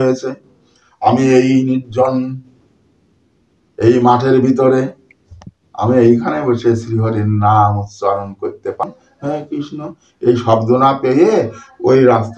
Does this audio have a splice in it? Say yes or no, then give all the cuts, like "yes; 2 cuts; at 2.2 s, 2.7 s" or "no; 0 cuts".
yes; 1 cut; at 8.8 s